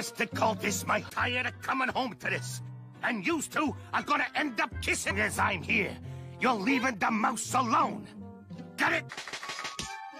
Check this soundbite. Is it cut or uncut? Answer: cut